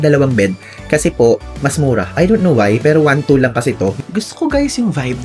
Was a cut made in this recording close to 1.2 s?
no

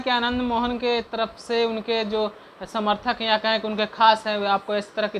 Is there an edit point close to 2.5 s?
no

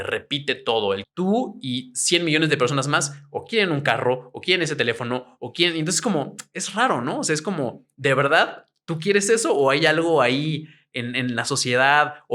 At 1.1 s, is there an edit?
yes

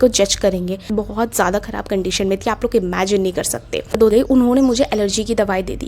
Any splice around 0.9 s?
yes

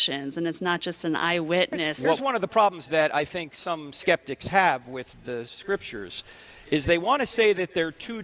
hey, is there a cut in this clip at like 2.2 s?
yes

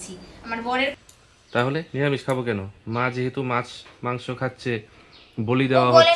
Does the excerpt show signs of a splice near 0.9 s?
yes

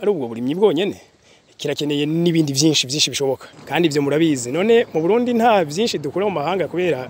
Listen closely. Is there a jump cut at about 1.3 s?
no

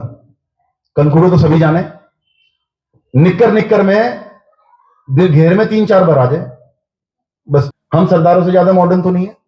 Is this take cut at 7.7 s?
yes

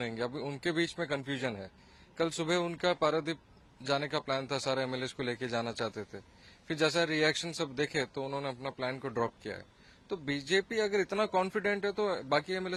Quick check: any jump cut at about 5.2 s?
no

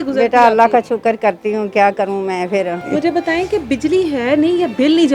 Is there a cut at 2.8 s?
yes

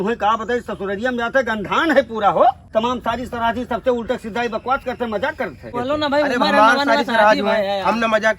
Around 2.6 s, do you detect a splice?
yes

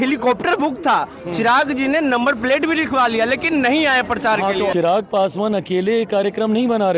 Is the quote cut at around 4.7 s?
yes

